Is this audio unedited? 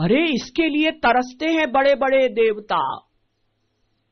yes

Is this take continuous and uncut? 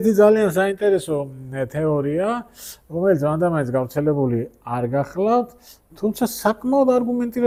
yes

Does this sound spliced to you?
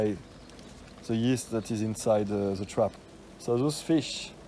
yes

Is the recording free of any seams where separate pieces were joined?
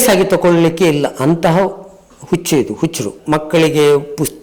no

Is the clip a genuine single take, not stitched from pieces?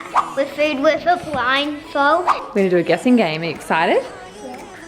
no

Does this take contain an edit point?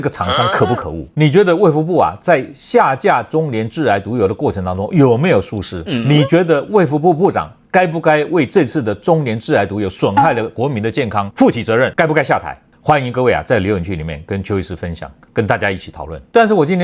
yes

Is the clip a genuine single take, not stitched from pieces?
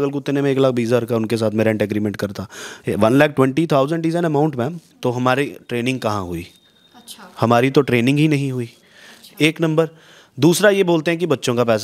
no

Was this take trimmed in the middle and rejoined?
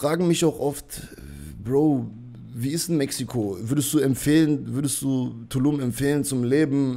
no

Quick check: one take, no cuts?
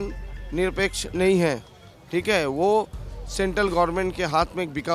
yes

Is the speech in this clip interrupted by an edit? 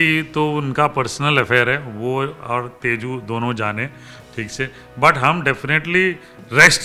no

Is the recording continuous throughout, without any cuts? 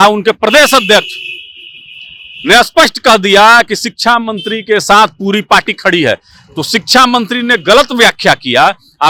yes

